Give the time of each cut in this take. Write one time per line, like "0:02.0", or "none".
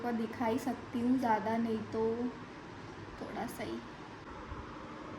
0:04.3